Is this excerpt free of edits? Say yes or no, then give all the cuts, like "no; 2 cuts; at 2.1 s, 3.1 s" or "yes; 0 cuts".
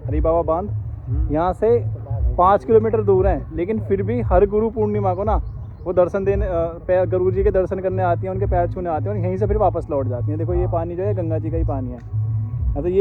yes; 0 cuts